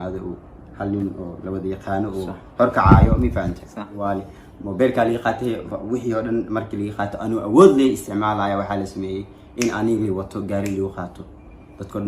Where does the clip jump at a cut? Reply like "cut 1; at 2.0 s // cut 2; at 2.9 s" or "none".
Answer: cut 1; at 4.0 s